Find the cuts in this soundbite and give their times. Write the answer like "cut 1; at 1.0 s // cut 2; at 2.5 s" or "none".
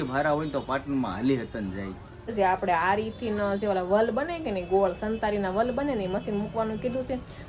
cut 1; at 2.3 s